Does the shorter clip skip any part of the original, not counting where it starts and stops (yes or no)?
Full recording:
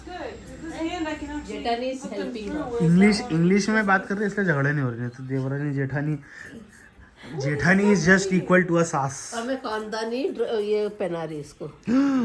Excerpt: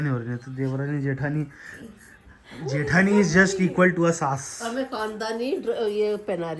no